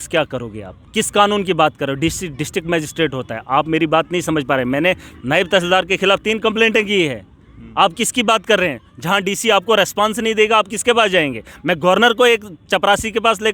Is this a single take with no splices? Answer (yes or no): yes